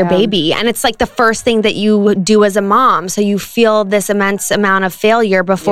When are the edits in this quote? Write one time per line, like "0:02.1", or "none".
none